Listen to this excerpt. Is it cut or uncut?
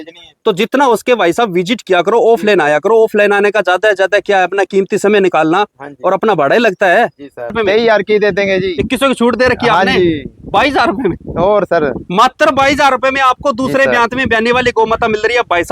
cut